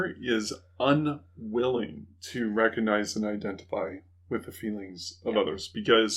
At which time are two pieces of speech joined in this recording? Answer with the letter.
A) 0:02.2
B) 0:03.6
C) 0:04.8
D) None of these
A